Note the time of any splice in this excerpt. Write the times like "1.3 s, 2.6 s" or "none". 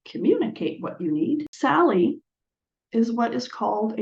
1.5 s